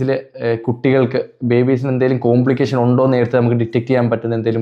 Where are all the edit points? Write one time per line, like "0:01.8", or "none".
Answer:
none